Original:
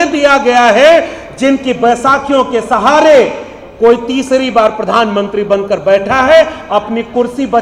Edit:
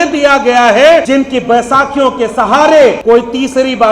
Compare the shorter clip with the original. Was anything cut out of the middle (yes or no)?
yes